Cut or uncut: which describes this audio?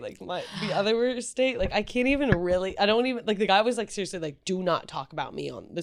uncut